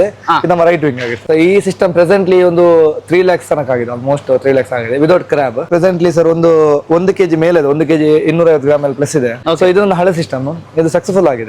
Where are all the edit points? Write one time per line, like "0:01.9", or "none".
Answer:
0:01.1
0:05.7
0:09.4